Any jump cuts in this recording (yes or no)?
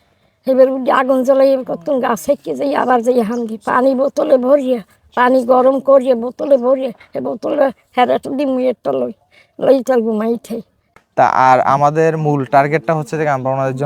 yes